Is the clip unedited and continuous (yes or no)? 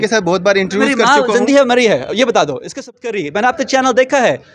no